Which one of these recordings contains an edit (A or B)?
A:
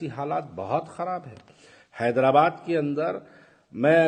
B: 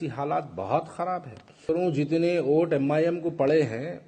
B